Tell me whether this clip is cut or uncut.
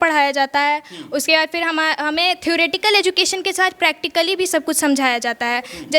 uncut